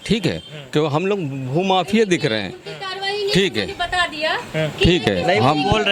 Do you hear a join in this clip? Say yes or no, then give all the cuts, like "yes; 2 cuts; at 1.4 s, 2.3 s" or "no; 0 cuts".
no; 0 cuts